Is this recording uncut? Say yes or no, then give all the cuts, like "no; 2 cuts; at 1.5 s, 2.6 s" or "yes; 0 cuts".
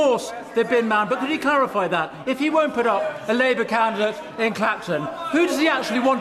yes; 0 cuts